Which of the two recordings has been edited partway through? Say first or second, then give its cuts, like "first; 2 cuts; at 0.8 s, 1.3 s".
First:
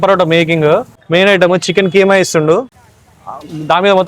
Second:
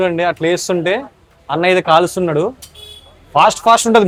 first; 1 cut; at 1.0 s